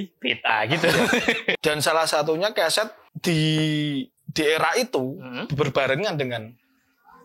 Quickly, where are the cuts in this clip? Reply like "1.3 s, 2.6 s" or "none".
1.6 s, 3.0 s